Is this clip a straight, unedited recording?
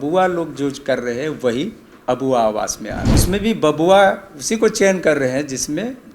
no; 1 cut; at 3.2 s

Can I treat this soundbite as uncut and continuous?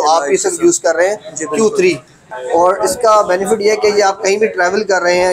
no; 1 cut; at 2.2 s

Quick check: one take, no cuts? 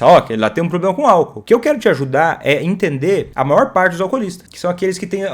no; 3 cuts; at 1.4 s, 3.3 s, 4.4 s

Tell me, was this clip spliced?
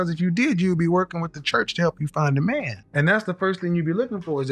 yes; 1 cut; at 2.8 s

